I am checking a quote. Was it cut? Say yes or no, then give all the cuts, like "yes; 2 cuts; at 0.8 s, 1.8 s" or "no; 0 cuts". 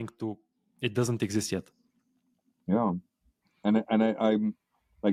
no; 0 cuts